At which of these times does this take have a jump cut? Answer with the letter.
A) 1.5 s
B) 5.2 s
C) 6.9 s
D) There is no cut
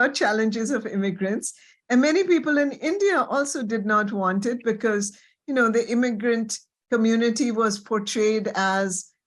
D